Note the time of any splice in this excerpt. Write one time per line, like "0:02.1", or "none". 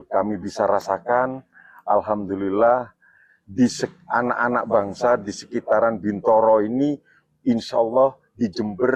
none

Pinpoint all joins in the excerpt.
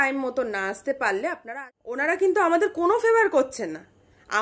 0:01.4

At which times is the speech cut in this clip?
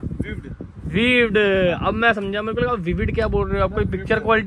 none

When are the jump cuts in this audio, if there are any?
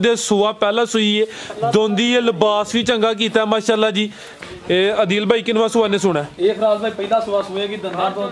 0:04.3

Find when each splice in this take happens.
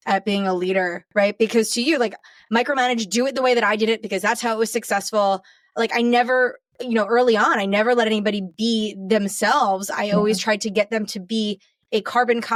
none

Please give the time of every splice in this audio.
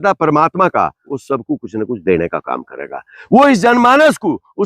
0:01.0

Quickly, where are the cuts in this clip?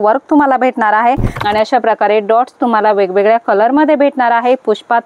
0:01.3

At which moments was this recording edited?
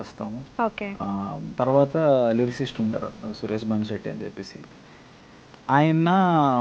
0:01.4

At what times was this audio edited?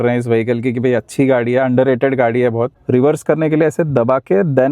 0:02.8

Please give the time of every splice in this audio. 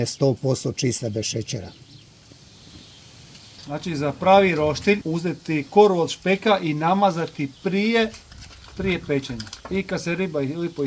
0:03.6

